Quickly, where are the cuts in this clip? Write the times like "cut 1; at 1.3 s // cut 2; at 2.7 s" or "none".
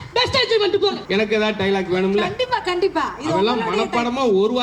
cut 1; at 1.0 s